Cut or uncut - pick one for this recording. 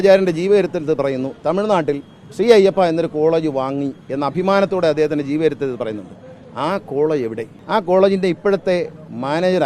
cut